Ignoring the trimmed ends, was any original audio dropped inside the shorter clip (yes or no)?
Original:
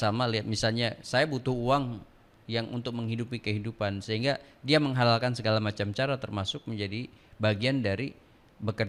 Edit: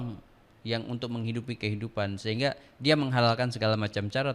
no